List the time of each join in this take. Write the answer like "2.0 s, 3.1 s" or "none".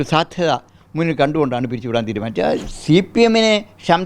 2.7 s